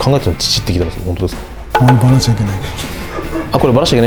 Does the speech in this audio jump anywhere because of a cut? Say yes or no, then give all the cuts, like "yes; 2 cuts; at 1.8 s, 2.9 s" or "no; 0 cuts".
no; 0 cuts